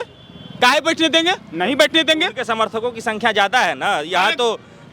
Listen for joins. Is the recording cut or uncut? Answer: uncut